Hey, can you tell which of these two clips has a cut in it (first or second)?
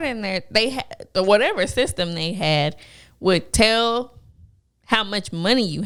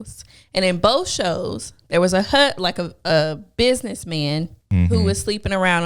second